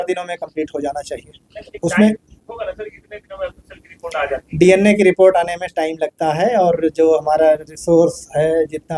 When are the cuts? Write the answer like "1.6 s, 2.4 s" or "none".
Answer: none